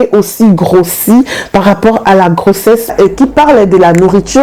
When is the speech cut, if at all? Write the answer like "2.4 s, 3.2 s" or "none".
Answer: 2.9 s